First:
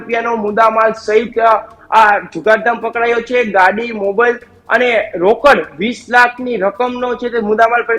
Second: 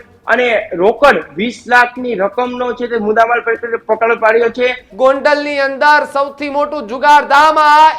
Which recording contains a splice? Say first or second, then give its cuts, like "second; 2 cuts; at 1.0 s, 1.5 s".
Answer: second; 1 cut; at 4.8 s